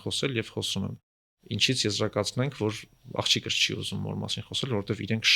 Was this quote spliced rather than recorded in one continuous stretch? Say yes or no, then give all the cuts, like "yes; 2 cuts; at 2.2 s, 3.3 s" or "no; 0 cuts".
no; 0 cuts